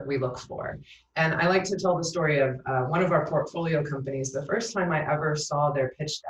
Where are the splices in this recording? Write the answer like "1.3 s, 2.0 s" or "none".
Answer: none